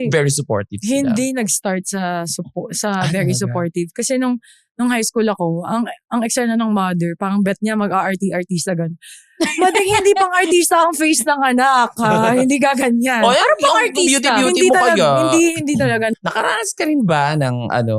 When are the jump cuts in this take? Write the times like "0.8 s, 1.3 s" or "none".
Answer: 16.2 s